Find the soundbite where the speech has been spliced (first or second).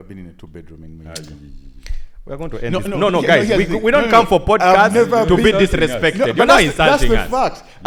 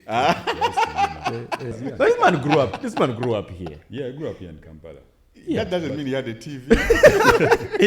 second